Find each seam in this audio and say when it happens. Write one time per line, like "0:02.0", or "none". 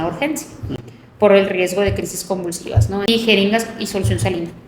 0:03.1